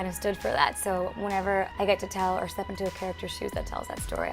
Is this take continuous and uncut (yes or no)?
no